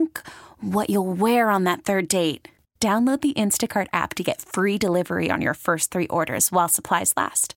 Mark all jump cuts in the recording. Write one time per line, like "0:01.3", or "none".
none